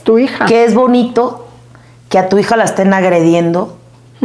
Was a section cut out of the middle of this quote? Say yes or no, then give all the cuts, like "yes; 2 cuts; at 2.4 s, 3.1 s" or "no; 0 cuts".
no; 0 cuts